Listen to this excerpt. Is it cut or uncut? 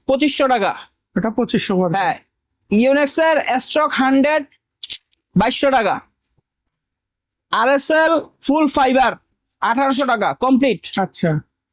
uncut